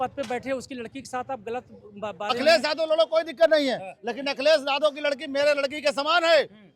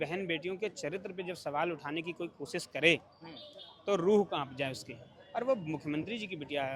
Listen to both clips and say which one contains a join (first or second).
first